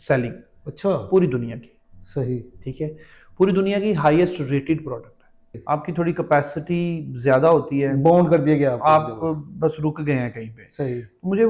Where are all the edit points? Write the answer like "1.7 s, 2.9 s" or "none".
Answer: 5.6 s